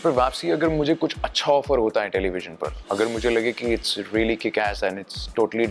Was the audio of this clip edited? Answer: no; 0 cuts

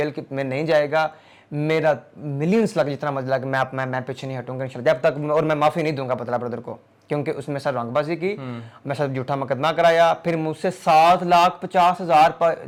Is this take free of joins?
yes; 0 cuts

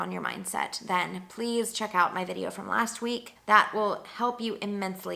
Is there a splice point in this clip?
yes; 1 cut; at 3.3 s

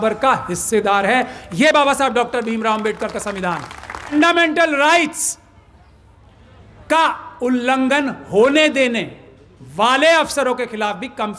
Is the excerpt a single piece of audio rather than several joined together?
no; 1 cut; at 4.1 s

